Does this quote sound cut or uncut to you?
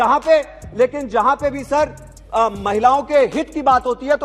uncut